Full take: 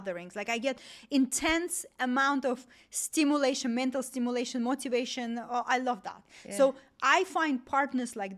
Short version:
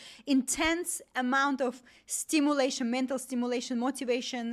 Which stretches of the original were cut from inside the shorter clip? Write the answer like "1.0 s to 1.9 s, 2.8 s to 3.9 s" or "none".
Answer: none